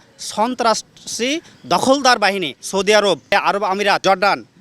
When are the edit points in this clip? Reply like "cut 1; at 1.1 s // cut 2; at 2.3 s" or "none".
cut 1; at 2.6 s // cut 2; at 3.5 s